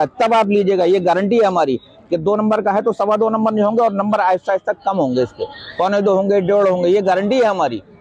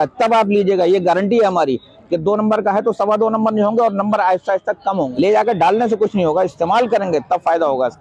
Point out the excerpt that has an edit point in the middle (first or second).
second